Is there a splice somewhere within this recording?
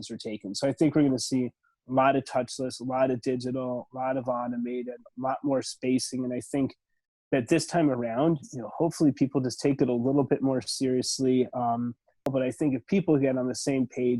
yes; 1 cut; at 12.3 s

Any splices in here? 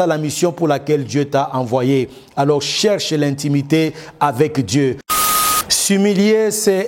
yes; 1 cut; at 5.3 s

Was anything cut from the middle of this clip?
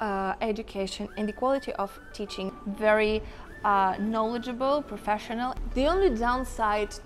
yes; 2 cuts; at 2.5 s, 5.6 s

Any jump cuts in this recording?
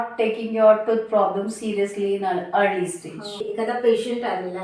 yes; 1 cut; at 3.4 s

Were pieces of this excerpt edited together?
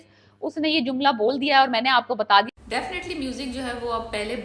yes; 1 cut; at 2.5 s

